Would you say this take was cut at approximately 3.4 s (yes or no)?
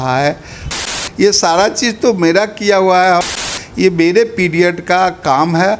yes